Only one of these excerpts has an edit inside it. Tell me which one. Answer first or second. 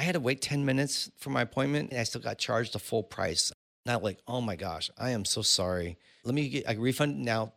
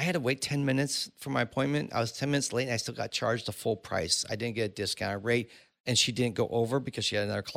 first